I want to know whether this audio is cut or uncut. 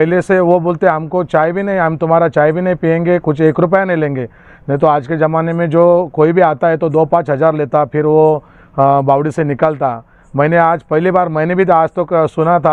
uncut